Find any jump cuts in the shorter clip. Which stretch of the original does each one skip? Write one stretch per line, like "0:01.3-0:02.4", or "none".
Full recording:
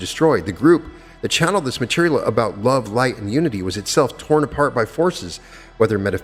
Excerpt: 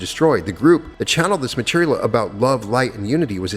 0:01.0-0:01.2